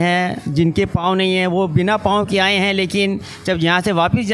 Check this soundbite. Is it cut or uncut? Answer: uncut